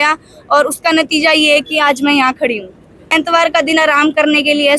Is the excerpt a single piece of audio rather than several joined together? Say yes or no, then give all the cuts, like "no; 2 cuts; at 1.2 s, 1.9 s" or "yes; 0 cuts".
no; 1 cut; at 3.1 s